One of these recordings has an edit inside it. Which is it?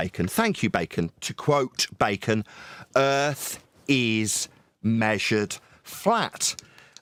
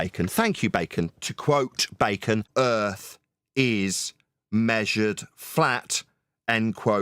second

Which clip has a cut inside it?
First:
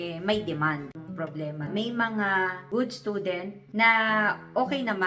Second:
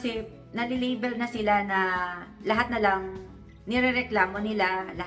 first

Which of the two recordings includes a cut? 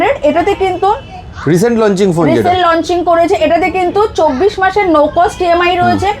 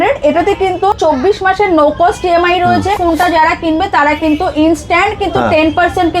second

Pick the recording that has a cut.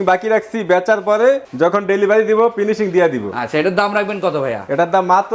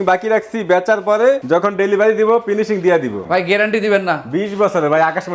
second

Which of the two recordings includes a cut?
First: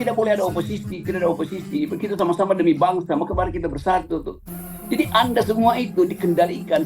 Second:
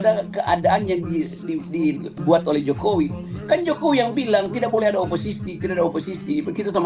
first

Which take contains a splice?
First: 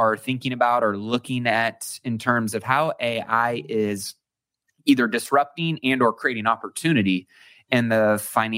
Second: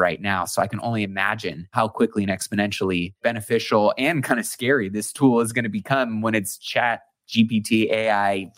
second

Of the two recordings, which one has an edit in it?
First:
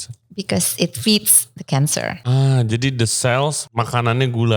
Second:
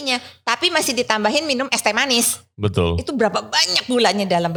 first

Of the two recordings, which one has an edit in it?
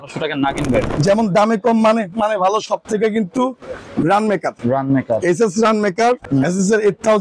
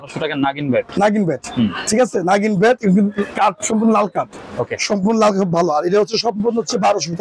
first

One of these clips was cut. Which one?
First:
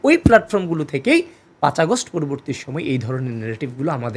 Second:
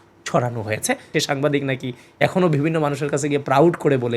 second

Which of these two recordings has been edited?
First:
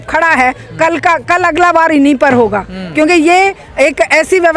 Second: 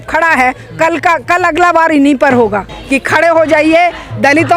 second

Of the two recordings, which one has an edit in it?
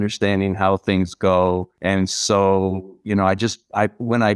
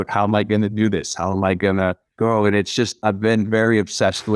second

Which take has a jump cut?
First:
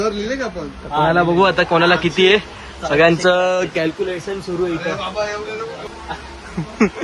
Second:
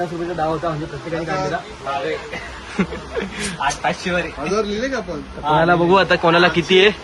first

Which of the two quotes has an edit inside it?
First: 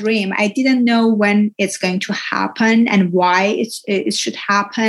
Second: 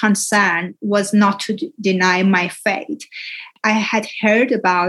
second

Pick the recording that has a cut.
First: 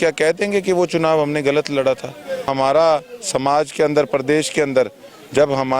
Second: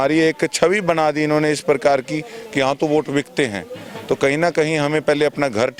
first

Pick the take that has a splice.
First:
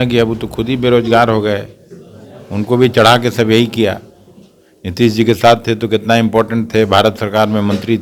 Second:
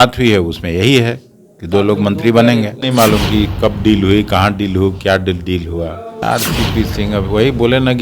second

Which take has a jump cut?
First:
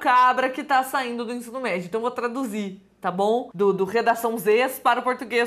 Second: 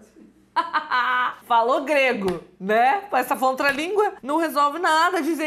second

